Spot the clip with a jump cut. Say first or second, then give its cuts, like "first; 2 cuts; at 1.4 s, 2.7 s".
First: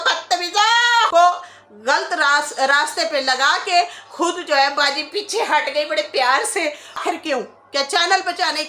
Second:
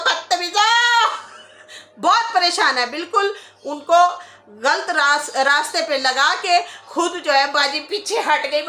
first; 2 cuts; at 1.1 s, 7.0 s